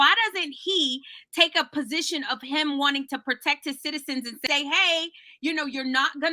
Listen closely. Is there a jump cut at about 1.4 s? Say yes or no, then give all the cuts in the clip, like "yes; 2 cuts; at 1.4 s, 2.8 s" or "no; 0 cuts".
no; 1 cut; at 4.4 s